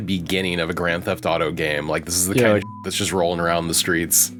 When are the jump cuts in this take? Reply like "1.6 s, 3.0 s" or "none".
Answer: none